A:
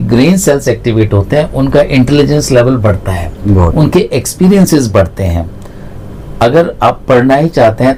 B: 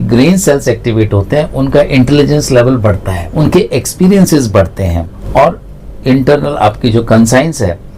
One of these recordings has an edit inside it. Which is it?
B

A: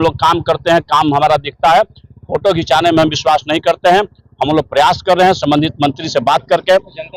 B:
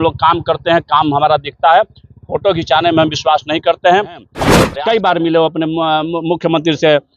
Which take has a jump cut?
B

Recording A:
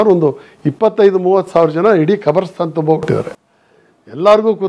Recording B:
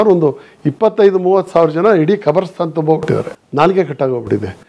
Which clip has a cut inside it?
B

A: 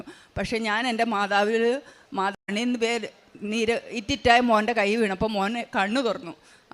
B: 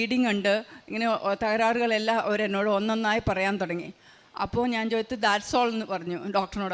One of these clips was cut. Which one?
A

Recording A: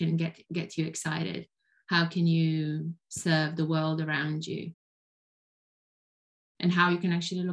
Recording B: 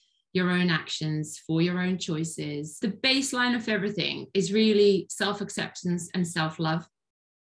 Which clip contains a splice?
B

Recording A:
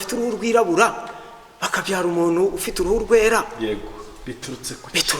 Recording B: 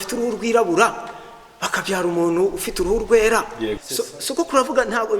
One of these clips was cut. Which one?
B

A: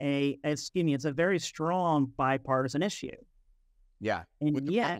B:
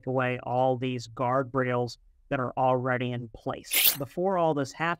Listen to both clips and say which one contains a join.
B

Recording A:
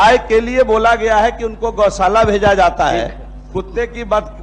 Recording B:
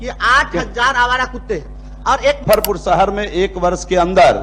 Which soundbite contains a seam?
B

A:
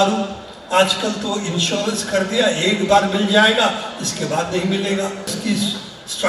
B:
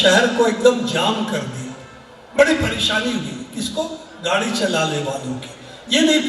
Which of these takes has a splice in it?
A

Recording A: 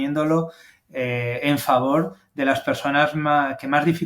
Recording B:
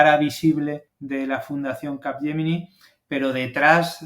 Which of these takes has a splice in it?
B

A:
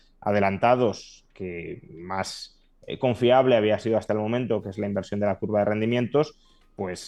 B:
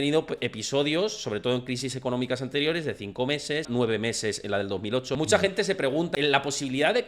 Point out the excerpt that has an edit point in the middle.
B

